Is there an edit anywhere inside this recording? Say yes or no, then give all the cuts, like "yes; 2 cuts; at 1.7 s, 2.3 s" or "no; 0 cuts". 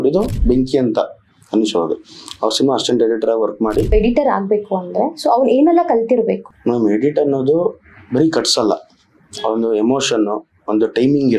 yes; 2 cuts; at 3.9 s, 6.5 s